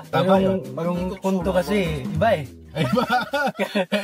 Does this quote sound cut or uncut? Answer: uncut